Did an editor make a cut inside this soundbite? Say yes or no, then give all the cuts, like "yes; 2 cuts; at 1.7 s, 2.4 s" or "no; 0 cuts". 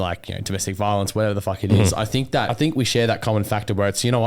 yes; 1 cut; at 2.5 s